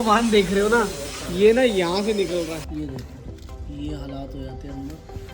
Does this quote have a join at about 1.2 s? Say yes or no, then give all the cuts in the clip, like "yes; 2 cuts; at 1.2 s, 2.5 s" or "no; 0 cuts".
no; 1 cut; at 2.7 s